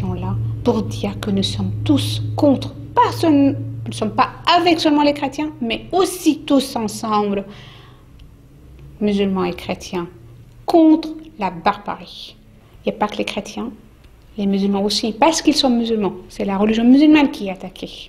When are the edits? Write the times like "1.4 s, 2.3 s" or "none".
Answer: none